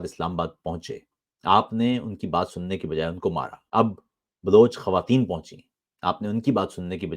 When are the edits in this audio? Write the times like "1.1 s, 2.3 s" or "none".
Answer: 3.6 s